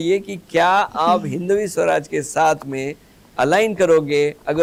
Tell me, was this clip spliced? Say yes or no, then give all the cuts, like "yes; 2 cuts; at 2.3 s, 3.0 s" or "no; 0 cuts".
no; 0 cuts